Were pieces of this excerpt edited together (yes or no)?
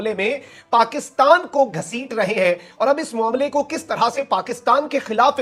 no